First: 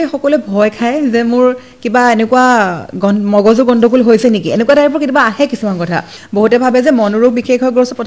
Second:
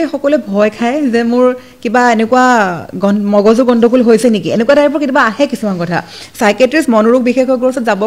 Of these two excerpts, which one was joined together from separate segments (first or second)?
first